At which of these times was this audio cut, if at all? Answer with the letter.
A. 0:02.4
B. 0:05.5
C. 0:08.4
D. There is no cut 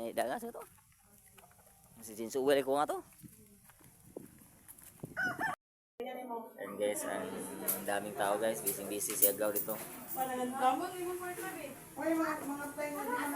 B